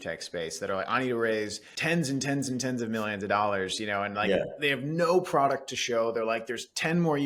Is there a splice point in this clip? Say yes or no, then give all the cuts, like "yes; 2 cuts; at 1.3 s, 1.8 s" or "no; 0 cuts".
no; 0 cuts